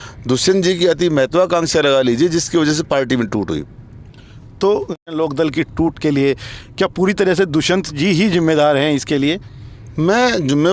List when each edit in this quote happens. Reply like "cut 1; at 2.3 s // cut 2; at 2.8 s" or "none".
none